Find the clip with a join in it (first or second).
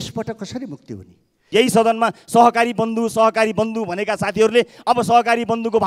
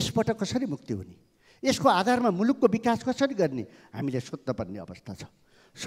first